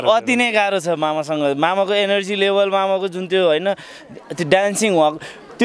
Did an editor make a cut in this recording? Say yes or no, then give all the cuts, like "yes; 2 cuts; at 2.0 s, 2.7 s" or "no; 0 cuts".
no; 0 cuts